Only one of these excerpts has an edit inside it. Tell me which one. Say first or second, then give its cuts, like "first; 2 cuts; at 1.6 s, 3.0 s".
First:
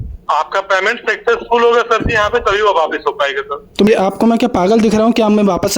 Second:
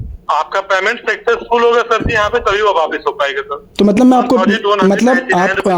first; 1 cut; at 3.9 s